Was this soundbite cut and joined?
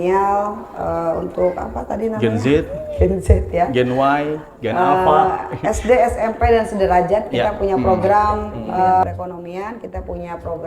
yes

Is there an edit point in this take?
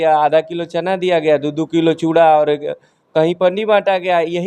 no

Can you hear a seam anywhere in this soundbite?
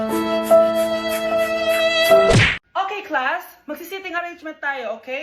yes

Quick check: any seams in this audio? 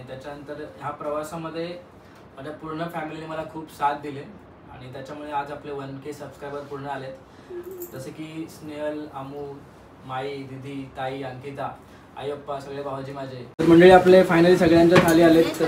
yes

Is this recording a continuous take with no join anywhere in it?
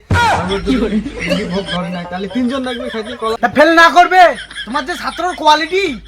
no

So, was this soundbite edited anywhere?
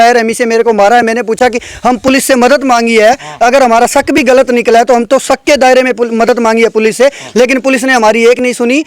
no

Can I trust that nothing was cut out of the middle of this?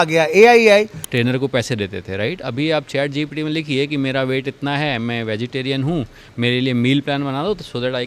no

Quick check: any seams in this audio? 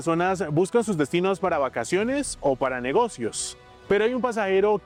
no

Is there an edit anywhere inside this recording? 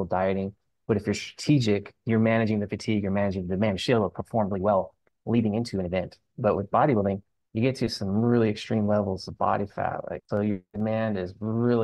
yes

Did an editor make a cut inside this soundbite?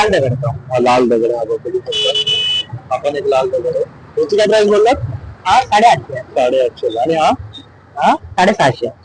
no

